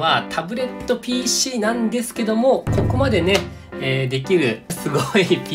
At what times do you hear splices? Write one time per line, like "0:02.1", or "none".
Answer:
none